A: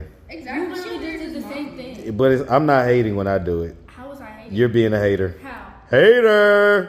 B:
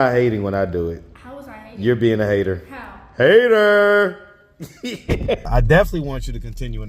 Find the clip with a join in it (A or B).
B